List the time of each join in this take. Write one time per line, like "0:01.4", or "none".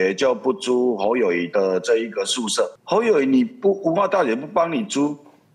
0:02.8